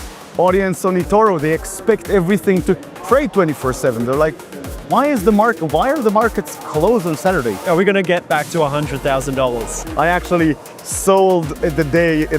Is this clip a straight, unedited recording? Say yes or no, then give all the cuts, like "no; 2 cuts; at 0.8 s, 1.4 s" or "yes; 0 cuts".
no; 2 cuts; at 7.6 s, 9.8 s